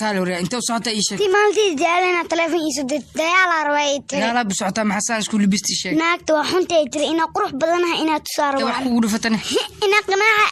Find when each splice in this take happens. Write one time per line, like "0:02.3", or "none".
none